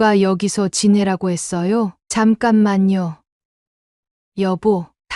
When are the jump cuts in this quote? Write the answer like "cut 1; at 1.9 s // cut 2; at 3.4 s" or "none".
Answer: cut 1; at 2.0 s // cut 2; at 3.2 s